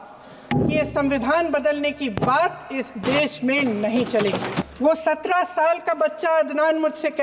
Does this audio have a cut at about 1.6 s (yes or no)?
no